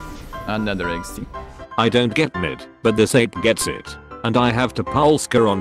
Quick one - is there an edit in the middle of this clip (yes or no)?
no